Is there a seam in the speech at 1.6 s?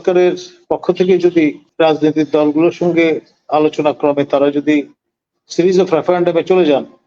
yes; 1 cut; at 1.6 s

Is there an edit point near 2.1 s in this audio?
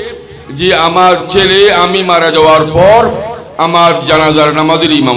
no; 0 cuts

